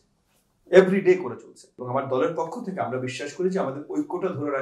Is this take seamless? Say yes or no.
no